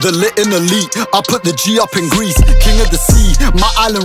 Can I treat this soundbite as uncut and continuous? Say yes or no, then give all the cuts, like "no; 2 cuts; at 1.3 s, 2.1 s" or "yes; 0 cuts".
yes; 0 cuts